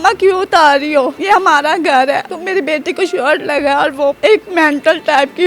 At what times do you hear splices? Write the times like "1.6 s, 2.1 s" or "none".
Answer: 1.2 s, 2.3 s, 4.2 s